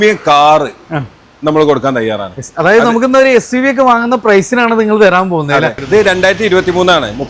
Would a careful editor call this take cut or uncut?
cut